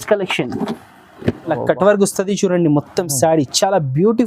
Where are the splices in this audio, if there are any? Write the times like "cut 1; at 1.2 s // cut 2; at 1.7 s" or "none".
cut 1; at 1.6 s